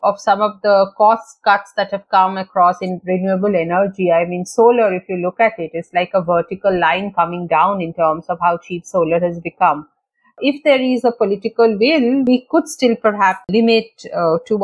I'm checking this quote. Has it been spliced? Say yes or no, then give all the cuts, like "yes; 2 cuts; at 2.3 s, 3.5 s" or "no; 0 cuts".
yes; 3 cuts; at 10.4 s, 12.2 s, 13.5 s